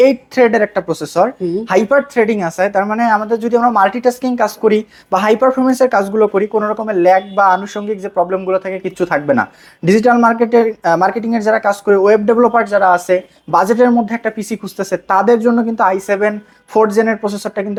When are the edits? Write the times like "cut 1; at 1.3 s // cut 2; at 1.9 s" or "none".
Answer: none